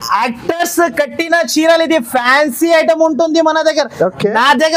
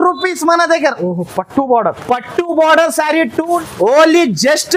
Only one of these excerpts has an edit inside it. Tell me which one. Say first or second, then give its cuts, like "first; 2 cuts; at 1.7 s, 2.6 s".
second; 1 cut; at 3.6 s